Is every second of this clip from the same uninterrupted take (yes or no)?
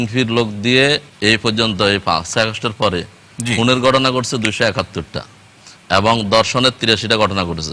no